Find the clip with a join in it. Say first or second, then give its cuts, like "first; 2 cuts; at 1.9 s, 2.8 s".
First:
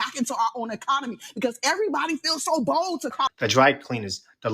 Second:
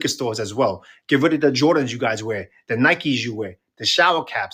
first; 1 cut; at 3.3 s